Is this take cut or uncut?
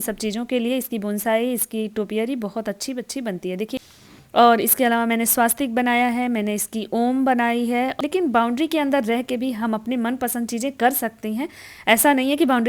cut